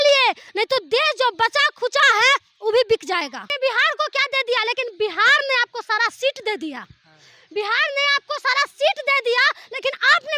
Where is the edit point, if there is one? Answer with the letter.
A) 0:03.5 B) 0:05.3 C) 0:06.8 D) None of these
A